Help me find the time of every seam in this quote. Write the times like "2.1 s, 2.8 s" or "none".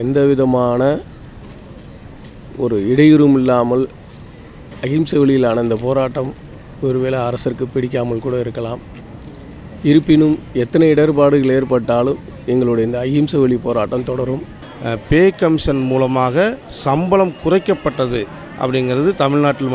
14.6 s

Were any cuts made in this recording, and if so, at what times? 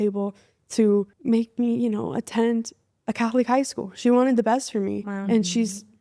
1.1 s

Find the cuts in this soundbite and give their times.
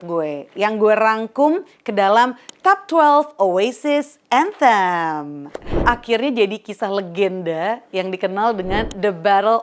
5.8 s

